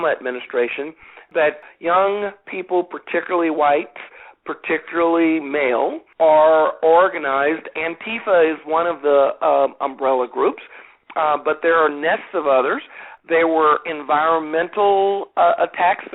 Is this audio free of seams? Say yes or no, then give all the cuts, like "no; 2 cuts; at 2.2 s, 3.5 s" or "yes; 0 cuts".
no; 3 cuts; at 1.5 s, 6.0 s, 13.1 s